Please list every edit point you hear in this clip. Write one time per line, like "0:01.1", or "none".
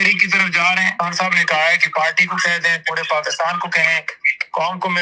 0:00.9